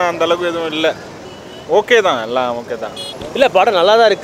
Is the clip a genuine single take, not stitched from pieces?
yes; 0 cuts

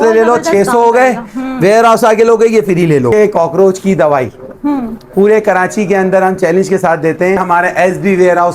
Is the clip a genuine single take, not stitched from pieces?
no; 2 cuts; at 3.1 s, 7.4 s

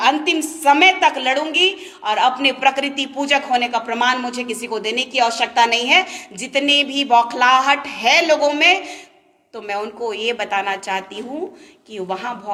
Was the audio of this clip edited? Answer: no; 0 cuts

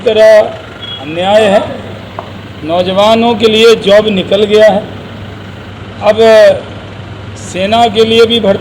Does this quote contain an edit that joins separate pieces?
no; 0 cuts

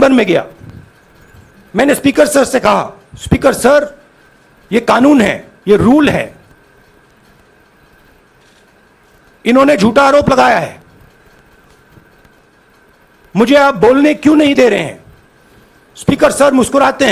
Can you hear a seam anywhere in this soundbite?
no; 0 cuts

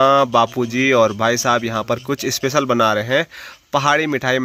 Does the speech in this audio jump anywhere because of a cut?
no; 0 cuts

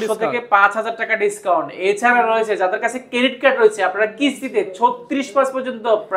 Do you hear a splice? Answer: no; 0 cuts

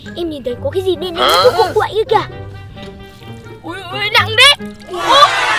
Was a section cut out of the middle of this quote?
yes; 1 cut; at 3.0 s

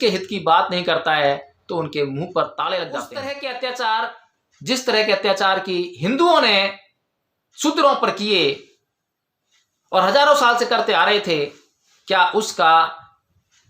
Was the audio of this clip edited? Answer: yes; 1 cut; at 3.1 s

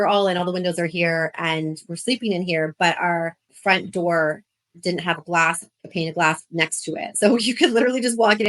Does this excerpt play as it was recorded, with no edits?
no; 1 cut; at 3.5 s

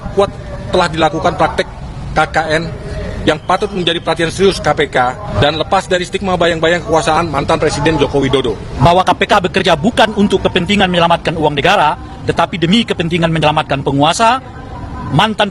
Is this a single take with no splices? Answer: no; 2 cuts; at 5.2 s, 8.7 s

